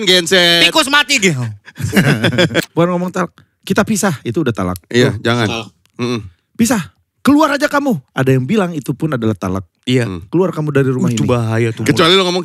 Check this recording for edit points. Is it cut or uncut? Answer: cut